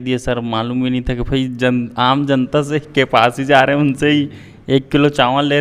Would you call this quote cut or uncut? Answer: uncut